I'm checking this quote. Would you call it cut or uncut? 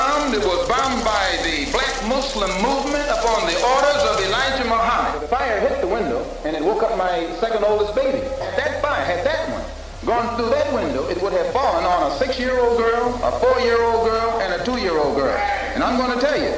cut